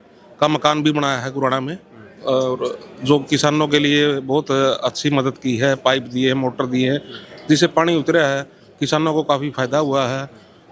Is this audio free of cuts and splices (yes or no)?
yes